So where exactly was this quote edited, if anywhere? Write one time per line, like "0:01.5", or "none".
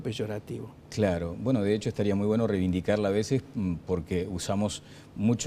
0:02.5